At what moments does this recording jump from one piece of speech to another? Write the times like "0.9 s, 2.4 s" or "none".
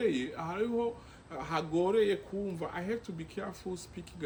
none